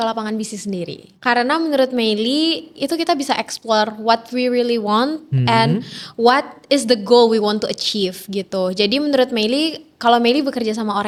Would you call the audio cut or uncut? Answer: uncut